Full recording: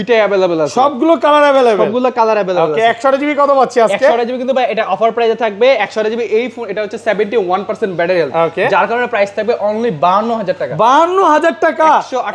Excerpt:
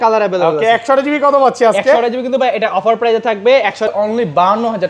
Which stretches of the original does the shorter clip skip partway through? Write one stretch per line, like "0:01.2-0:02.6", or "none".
0:06.0-0:09.5